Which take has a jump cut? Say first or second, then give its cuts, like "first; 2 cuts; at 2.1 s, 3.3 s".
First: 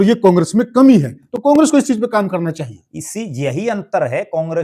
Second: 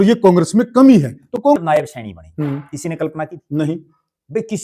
second; 1 cut; at 1.6 s